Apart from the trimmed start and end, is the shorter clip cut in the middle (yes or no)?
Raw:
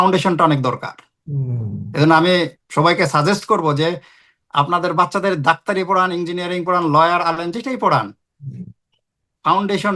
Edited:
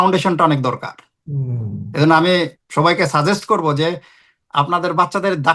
no